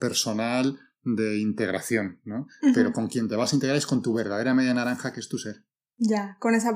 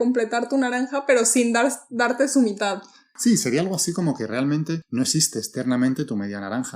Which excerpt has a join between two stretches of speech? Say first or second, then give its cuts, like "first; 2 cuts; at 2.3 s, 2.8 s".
second; 2 cuts; at 3.1 s, 4.8 s